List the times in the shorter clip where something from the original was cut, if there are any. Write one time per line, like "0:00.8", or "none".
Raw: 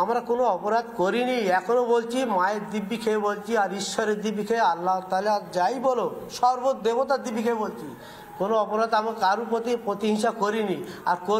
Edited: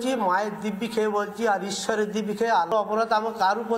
0:02.7